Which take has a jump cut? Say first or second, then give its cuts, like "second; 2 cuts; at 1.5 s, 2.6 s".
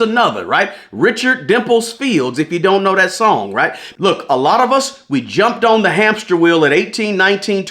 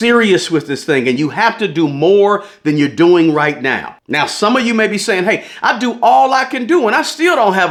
first; 1 cut; at 3.8 s